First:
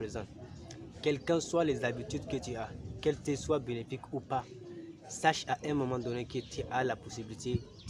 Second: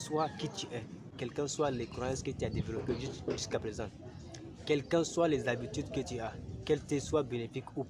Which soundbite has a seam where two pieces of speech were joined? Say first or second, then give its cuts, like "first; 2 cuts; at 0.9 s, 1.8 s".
second; 1 cut; at 1.2 s